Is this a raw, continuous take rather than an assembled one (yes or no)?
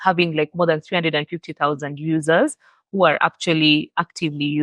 yes